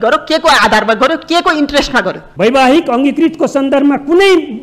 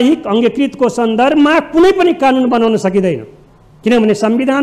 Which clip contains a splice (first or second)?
first